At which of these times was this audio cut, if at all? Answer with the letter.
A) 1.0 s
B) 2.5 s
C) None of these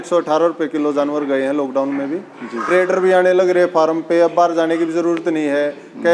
B